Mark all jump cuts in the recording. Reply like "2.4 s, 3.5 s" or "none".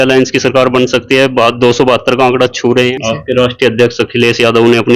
3.0 s